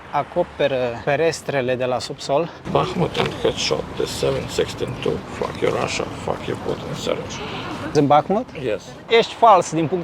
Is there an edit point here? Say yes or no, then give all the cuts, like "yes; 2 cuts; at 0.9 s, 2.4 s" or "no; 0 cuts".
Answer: yes; 2 cuts; at 2.6 s, 9.0 s